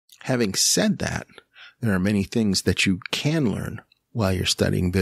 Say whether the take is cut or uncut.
uncut